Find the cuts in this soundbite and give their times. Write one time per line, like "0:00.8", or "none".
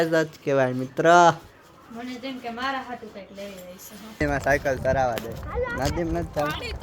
0:04.2